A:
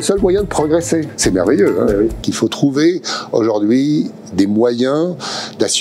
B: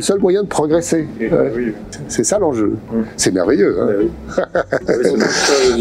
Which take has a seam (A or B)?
A